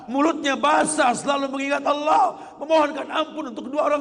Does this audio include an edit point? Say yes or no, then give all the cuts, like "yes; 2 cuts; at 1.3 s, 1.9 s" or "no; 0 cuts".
no; 0 cuts